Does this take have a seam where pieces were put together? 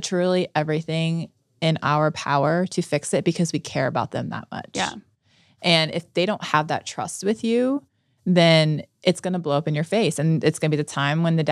no; 0 cuts

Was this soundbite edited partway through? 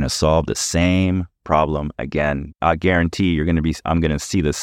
yes; 1 cut; at 2.6 s

